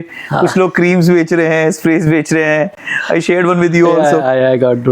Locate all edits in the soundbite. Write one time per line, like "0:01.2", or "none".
none